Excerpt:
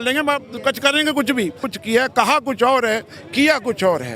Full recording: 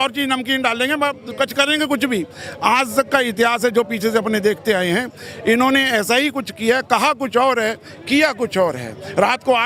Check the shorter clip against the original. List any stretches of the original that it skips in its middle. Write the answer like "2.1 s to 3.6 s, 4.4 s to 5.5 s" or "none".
2.4 s to 6.4 s

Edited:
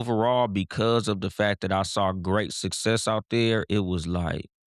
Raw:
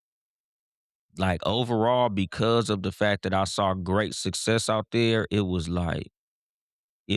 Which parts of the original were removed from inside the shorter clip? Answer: none

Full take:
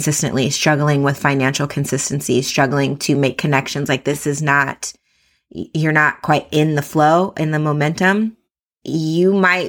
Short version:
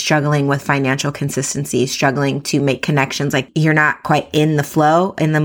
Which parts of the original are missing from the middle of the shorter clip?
4.0 s to 5.6 s

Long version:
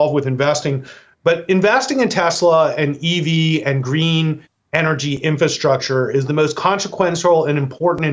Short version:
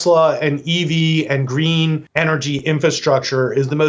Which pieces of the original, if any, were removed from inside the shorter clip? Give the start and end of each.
4.4 s to 4.6 s

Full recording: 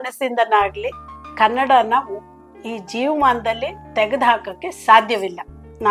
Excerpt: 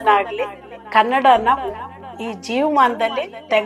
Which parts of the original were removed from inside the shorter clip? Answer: none

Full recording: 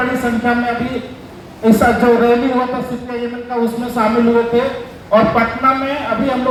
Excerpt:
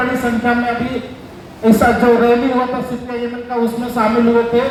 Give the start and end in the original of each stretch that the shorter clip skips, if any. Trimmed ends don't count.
none

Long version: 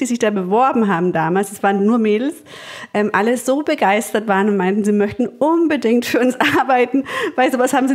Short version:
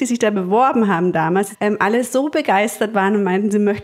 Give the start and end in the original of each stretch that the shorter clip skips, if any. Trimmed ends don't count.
1.5 s to 2.8 s

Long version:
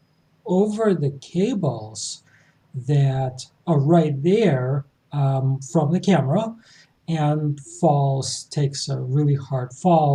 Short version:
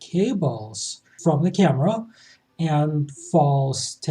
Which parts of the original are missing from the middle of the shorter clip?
2.3 s to 5.6 s

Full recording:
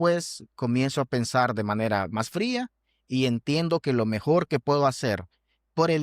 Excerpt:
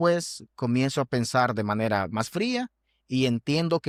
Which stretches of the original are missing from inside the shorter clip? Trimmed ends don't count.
none

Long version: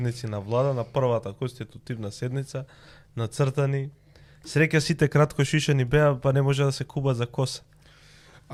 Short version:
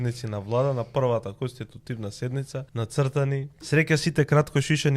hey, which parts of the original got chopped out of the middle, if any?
2.7 s to 3.1 s, 4.0 s to 4.4 s

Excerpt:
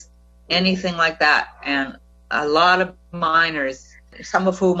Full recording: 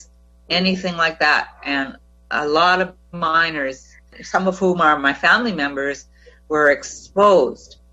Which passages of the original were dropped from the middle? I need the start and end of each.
none

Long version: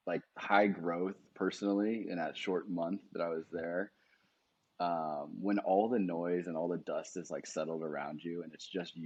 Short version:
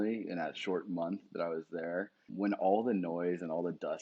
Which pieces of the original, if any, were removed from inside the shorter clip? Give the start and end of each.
4.1 s to 5.3 s

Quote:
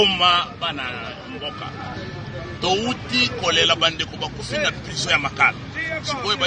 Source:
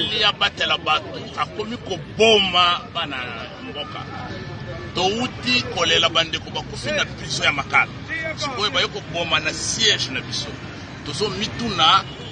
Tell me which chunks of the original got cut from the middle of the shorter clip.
none

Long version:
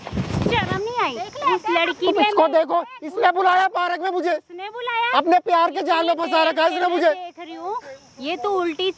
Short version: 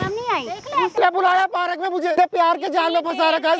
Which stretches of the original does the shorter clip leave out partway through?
1.6 s to 3.1 s, 4.4 s to 5.3 s

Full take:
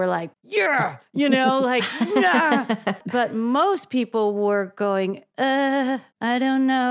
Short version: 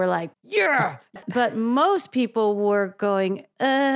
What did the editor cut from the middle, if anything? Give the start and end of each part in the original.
1.1 s to 2.9 s

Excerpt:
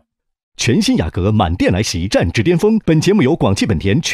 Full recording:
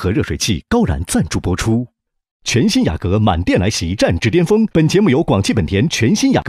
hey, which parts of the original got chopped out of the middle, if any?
none

